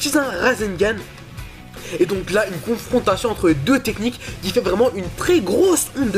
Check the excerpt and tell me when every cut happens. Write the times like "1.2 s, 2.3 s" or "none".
2.0 s